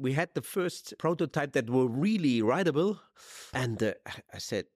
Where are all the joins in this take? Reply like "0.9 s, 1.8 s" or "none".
0.9 s, 3.5 s